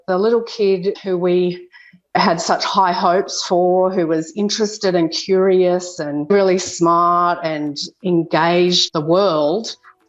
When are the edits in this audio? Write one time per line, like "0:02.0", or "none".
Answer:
0:01.0
0:06.3
0:08.8